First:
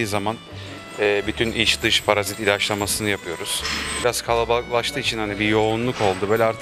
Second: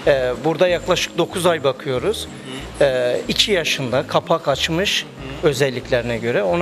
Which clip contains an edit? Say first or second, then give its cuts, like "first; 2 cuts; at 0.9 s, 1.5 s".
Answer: first; 1 cut; at 4.0 s